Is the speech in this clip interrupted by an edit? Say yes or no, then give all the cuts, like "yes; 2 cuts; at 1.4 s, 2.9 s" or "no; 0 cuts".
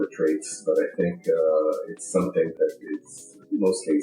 yes; 1 cut; at 2.5 s